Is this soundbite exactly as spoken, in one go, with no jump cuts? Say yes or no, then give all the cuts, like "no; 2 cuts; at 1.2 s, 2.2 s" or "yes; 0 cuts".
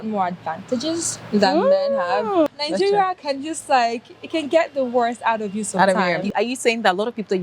no; 2 cuts; at 2.5 s, 6.3 s